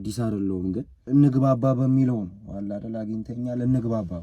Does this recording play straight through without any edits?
no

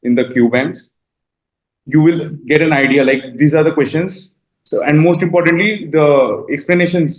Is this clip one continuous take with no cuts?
yes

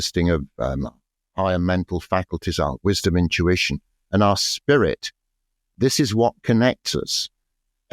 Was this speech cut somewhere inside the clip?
yes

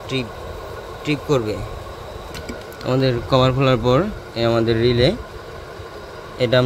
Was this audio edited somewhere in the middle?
yes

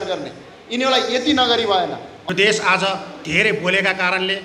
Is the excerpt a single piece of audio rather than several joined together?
no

